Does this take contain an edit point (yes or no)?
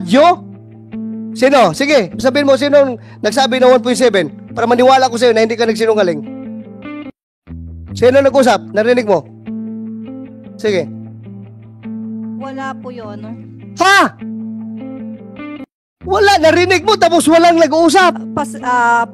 yes